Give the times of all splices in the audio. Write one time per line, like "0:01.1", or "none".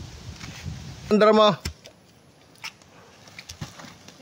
0:01.1